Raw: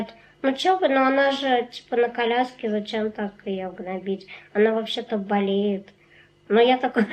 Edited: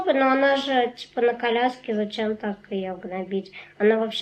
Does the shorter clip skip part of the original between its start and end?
no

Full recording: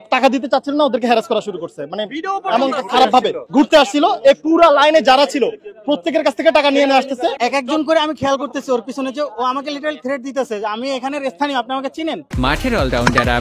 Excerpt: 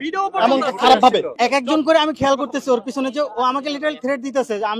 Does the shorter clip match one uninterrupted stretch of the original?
no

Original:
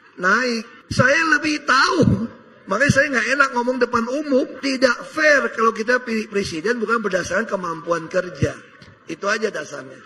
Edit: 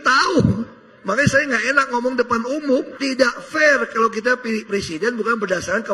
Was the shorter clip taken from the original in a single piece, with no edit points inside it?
yes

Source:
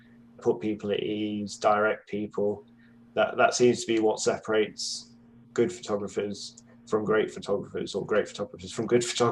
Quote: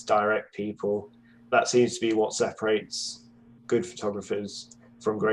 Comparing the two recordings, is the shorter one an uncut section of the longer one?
no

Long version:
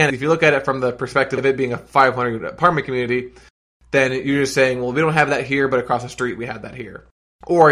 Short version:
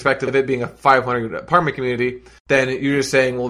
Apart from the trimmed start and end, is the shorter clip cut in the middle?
yes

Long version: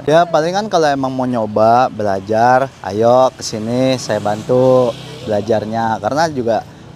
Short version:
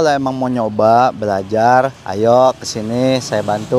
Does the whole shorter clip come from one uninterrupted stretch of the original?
yes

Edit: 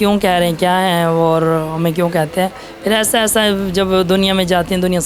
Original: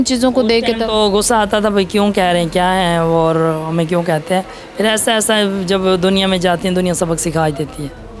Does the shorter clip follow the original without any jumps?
yes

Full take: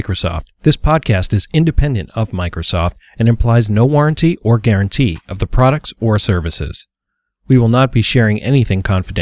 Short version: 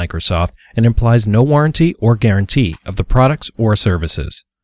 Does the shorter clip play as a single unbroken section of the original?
yes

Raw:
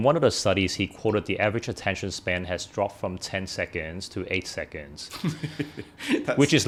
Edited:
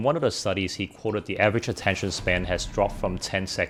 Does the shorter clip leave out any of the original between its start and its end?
no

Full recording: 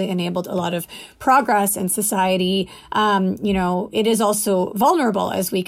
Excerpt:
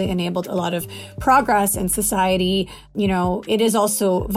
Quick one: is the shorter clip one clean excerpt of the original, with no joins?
no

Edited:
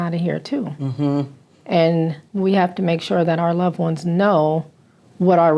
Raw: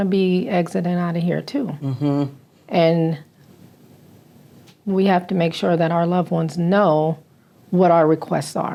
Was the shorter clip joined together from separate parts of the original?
yes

